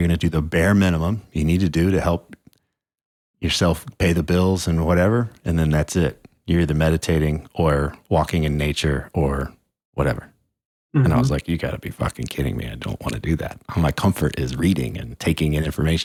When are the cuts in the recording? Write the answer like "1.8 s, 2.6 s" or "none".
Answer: none